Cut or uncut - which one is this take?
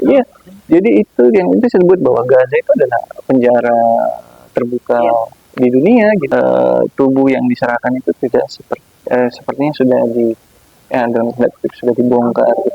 cut